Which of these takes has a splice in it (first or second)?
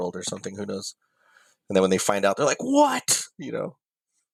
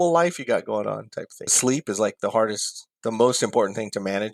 second